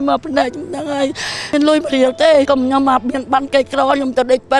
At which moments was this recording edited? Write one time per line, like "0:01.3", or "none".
0:01.5